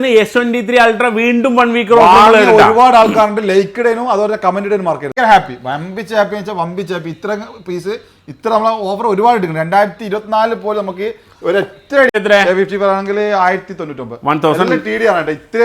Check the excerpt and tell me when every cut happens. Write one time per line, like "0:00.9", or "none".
0:05.1
0:12.1